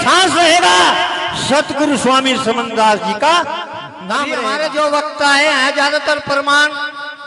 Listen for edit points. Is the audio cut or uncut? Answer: cut